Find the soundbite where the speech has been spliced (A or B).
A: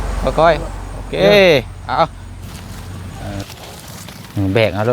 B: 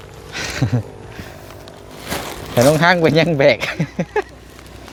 A